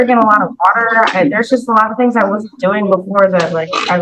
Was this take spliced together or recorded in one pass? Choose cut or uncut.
uncut